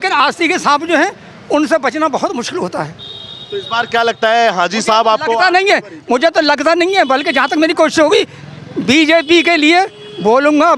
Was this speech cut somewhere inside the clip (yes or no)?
no